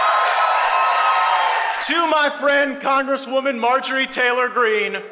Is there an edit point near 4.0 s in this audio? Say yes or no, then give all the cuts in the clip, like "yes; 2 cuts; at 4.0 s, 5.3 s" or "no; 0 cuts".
no; 1 cut; at 1.8 s